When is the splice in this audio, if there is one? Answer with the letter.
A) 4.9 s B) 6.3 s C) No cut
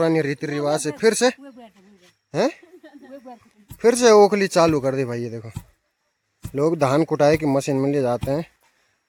C